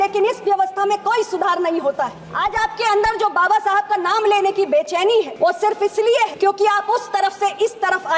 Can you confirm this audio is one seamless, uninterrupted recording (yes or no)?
no